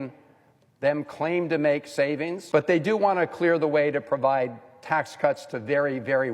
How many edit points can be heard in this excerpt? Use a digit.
1